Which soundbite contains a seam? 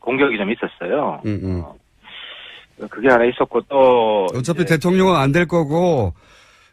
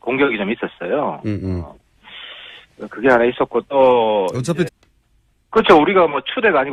first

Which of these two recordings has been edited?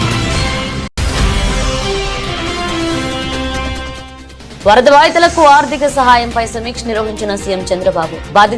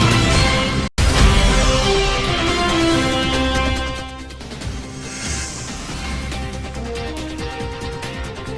first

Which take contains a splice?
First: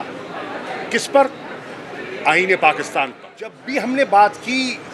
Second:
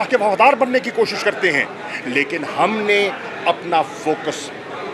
first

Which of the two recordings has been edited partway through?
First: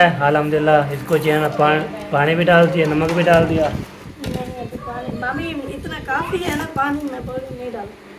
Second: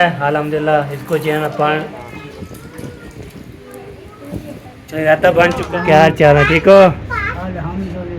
second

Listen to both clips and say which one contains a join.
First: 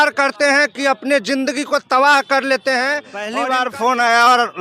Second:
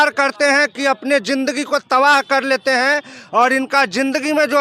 first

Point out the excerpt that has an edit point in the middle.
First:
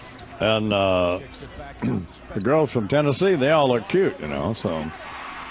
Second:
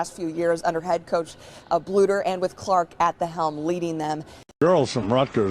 second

